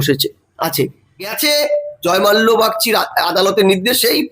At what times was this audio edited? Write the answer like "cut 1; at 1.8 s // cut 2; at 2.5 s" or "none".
cut 1; at 1.3 s